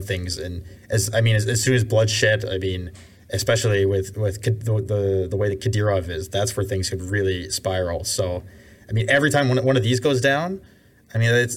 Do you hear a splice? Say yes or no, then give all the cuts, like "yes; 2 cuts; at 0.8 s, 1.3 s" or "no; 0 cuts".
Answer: no; 0 cuts